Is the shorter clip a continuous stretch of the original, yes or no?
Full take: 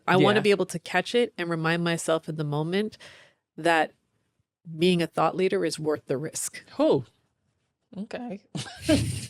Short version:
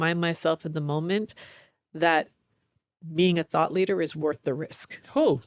yes